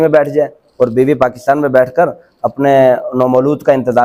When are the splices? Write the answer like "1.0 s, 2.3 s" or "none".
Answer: none